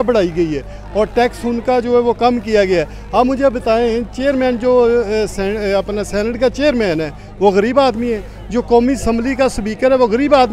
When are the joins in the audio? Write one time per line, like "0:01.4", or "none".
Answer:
none